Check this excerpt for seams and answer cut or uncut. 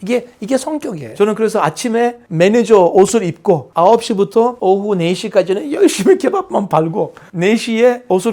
cut